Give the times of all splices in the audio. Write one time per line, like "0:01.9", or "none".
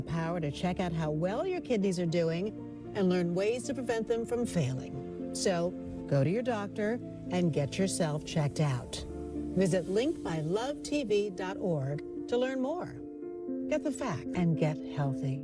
0:14.3